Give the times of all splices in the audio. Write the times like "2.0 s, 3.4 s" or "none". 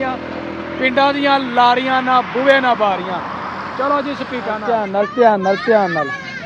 4.6 s